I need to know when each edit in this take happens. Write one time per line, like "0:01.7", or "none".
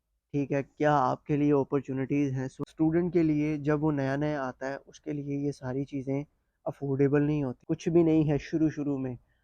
0:02.5
0:07.6